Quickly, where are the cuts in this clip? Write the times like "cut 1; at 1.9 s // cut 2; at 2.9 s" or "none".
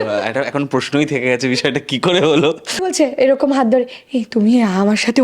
cut 1; at 2.9 s